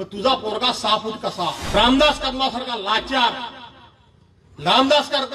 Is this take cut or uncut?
cut